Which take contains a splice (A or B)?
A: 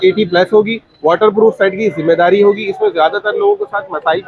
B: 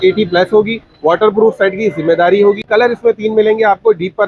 B